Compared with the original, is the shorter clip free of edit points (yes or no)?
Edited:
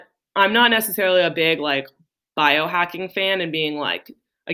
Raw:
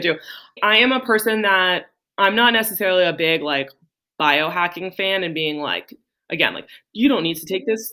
yes